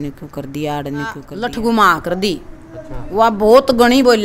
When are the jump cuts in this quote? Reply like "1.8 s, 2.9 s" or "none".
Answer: 1.3 s